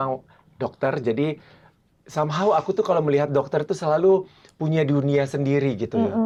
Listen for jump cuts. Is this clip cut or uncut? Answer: uncut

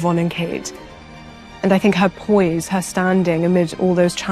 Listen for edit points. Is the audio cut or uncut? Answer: cut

